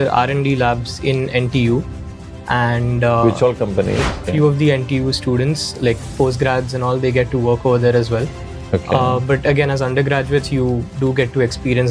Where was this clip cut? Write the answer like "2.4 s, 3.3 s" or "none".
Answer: 4.2 s